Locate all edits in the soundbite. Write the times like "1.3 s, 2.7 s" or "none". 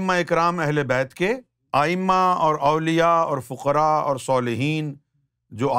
1.5 s